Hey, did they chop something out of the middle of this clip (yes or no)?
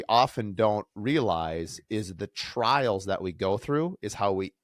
yes